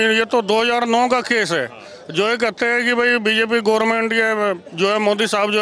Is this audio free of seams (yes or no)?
yes